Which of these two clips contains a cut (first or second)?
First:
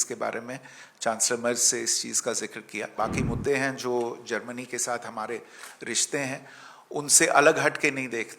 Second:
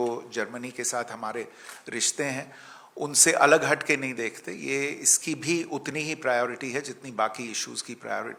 first